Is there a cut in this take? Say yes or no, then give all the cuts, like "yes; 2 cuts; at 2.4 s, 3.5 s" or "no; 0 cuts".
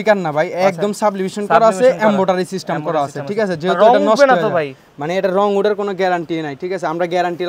no; 0 cuts